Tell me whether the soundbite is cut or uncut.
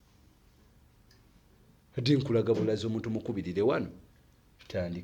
uncut